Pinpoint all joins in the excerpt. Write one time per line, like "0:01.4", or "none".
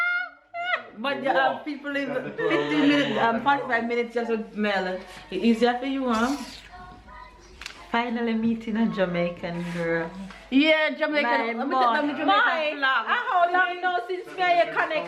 none

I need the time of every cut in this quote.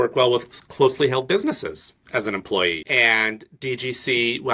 0:02.8

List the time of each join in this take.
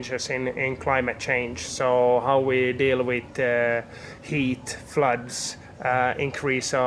none

